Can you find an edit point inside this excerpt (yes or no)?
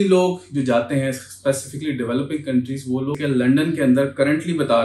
yes